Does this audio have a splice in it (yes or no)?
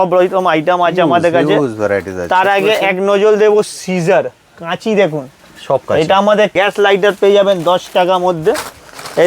yes